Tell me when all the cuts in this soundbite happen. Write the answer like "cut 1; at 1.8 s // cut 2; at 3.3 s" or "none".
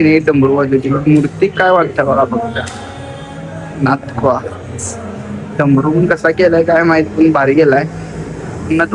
none